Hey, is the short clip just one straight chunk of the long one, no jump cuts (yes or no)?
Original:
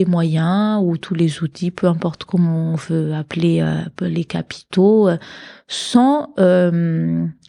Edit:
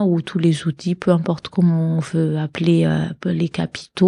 yes